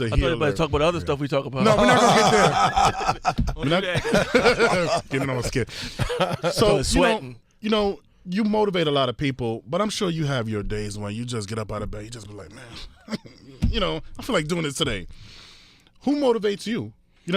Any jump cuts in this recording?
yes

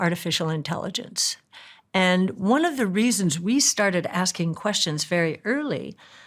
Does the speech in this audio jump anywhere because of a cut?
no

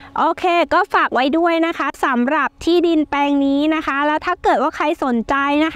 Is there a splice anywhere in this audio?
no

